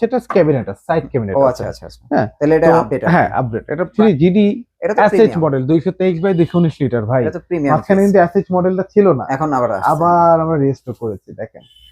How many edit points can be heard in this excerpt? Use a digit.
1